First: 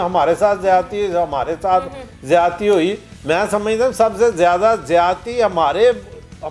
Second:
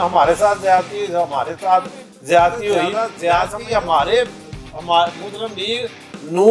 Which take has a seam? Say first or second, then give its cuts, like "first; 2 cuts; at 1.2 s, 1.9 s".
second; 1 cut; at 2.9 s